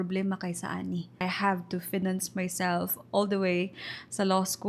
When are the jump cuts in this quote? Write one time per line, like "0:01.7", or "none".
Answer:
0:01.2